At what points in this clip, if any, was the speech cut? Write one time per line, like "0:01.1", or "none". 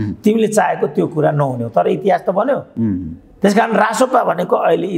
none